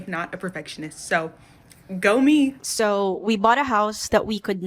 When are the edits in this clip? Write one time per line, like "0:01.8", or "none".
0:02.6